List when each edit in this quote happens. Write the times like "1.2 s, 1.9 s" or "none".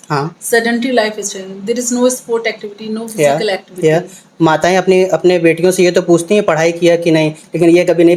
none